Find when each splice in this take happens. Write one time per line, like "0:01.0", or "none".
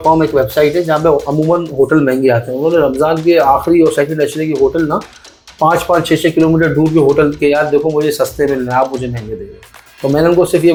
none